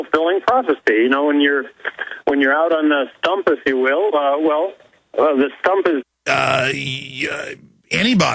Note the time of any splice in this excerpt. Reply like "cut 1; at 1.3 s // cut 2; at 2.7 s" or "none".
none